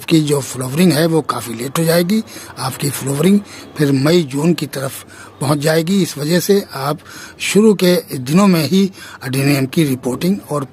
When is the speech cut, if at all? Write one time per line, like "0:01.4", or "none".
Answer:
none